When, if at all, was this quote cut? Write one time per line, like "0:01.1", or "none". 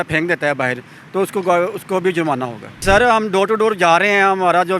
0:02.8